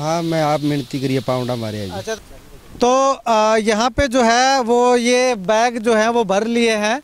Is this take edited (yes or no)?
yes